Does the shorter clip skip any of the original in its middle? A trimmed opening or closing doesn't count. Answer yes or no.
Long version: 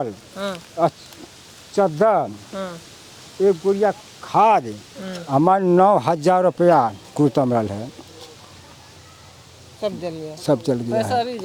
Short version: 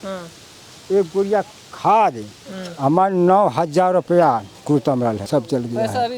yes